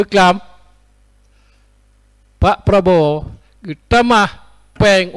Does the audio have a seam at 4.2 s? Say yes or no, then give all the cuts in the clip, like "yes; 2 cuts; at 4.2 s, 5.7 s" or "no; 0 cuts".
no; 0 cuts